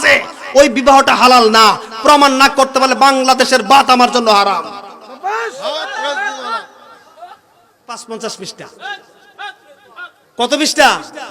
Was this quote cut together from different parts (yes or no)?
yes